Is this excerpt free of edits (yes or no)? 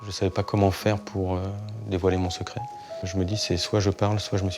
no